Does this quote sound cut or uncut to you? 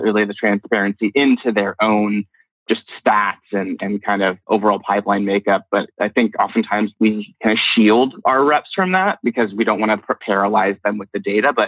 cut